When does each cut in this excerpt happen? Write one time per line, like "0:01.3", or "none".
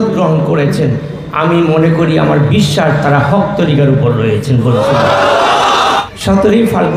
0:06.0